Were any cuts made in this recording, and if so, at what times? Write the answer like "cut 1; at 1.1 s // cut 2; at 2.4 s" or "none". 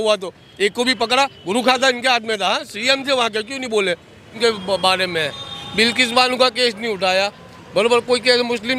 cut 1; at 4.4 s